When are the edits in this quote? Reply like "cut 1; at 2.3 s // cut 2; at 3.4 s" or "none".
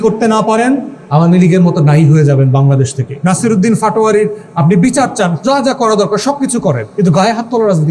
cut 1; at 1.0 s // cut 2; at 3.1 s // cut 3; at 6.9 s